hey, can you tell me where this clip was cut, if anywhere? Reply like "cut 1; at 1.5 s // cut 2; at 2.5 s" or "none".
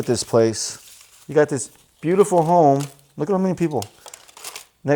none